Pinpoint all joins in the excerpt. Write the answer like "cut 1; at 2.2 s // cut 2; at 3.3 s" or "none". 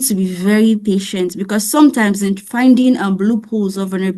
none